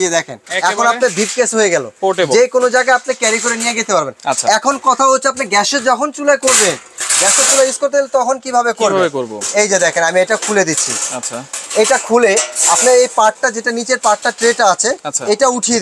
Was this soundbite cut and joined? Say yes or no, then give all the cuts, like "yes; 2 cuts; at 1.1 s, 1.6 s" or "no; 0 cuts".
no; 0 cuts